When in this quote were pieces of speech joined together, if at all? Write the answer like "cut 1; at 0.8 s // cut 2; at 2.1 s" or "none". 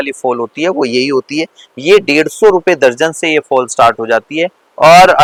none